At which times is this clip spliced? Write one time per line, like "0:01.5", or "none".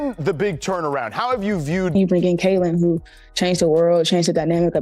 0:01.9